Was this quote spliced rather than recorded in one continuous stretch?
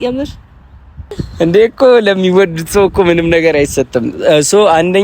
yes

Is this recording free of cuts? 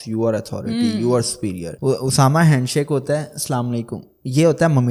no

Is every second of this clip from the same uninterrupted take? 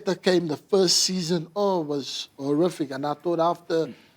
yes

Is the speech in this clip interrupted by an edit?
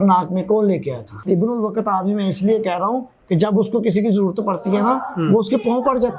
yes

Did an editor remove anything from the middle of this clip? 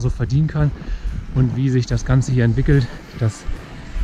no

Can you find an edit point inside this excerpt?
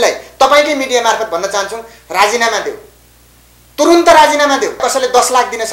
yes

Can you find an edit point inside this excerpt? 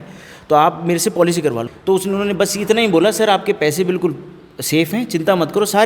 yes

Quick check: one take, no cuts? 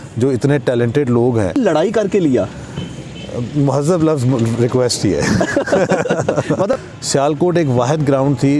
no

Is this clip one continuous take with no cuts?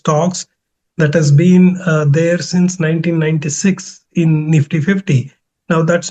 yes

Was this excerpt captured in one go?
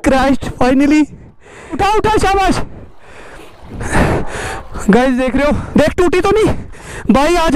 no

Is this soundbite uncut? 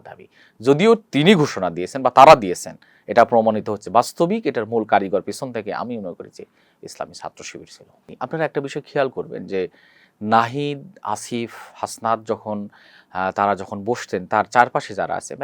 no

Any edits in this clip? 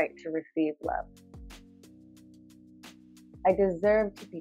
no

